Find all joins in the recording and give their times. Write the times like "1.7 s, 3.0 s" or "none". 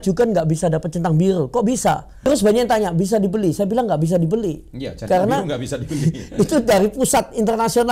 2.1 s